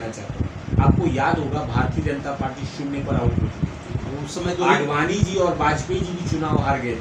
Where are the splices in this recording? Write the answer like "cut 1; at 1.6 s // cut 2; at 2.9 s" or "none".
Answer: none